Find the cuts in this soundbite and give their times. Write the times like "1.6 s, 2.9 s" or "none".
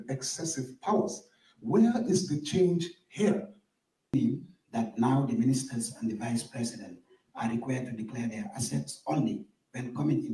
4.1 s